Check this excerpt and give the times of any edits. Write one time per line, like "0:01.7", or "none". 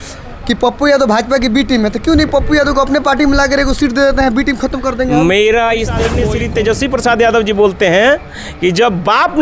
0:06.1